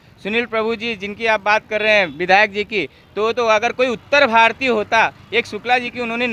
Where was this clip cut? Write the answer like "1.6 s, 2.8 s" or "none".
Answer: none